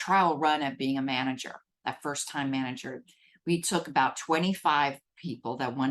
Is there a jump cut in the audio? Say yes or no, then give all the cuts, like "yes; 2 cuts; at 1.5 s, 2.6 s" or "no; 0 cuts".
no; 0 cuts